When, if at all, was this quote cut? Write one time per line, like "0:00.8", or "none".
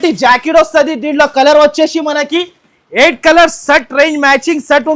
none